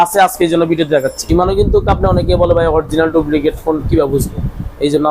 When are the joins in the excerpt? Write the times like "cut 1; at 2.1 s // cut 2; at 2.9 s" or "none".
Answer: cut 1; at 1.2 s